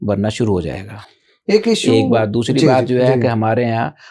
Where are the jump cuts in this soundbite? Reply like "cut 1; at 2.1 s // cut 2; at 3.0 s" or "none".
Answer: none